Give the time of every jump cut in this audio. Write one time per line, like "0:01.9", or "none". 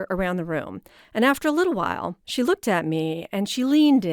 0:02.2